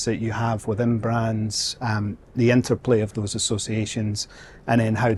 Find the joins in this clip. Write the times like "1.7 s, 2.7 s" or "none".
none